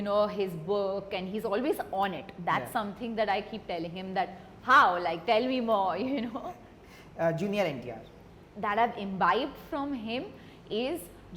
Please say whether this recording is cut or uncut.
uncut